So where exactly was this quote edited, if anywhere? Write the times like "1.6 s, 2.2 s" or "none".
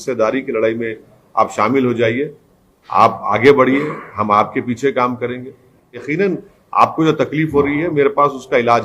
6.1 s